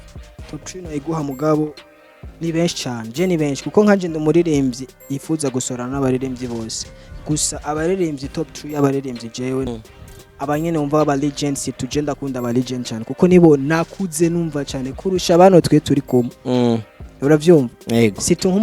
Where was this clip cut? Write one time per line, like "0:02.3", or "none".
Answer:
0:09.7